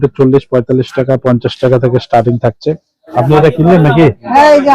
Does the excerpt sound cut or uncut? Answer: cut